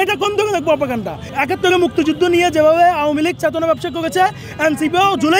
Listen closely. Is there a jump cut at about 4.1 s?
no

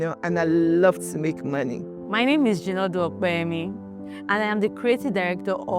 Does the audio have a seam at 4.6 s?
no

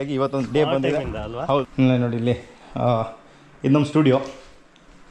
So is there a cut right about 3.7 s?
no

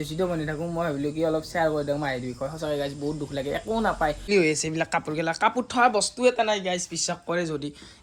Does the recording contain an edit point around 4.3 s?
yes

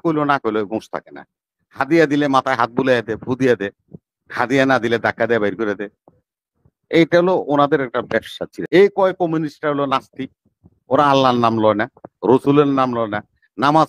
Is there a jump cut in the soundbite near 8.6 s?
yes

